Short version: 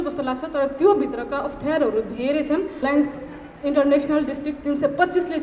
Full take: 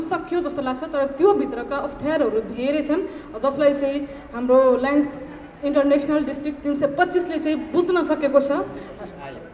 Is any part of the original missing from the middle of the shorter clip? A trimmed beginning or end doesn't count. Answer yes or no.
yes